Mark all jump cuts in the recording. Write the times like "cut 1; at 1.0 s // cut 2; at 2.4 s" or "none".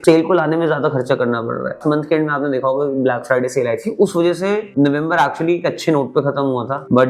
cut 1; at 1.8 s